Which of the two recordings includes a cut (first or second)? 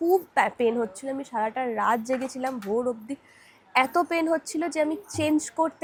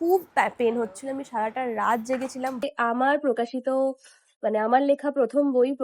second